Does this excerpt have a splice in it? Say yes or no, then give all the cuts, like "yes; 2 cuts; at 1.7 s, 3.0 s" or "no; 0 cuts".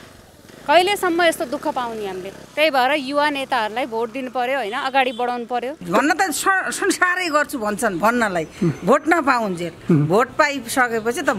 yes; 2 cuts; at 2.4 s, 5.8 s